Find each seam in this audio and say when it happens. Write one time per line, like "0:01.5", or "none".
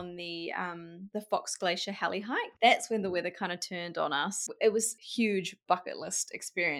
0:01.0
0:02.5
0:04.4
0:05.0

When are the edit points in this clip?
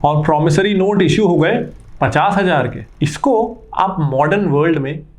0:02.8

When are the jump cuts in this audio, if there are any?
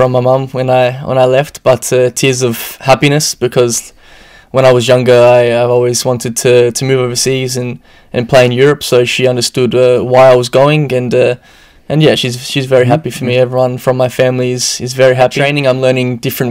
0:15.5

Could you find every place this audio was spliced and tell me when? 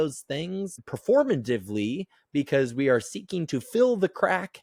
none

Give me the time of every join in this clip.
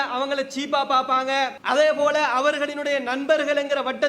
0:01.6

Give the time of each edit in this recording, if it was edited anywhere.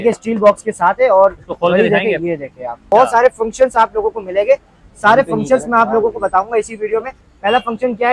0:02.9

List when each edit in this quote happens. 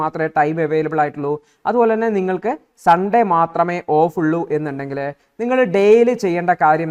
none

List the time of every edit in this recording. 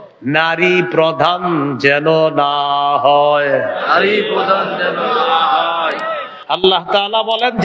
0:06.3

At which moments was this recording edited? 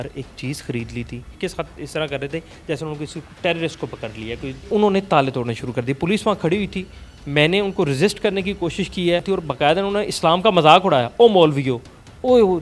0:01.3
0:04.7
0:09.2

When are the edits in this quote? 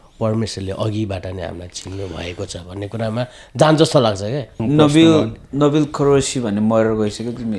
0:04.6

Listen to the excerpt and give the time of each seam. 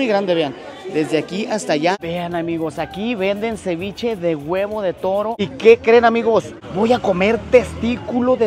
0:02.0
0:05.4

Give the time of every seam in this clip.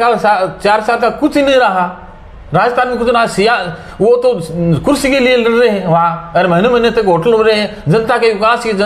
none

